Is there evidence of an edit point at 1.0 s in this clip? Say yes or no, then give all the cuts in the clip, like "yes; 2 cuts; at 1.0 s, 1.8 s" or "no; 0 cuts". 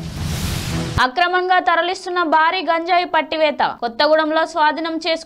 yes; 1 cut; at 1.0 s